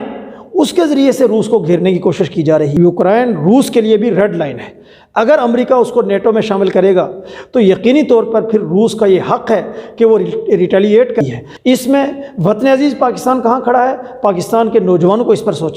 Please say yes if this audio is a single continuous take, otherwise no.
no